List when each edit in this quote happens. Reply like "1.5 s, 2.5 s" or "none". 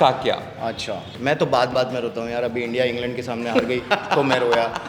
1.1 s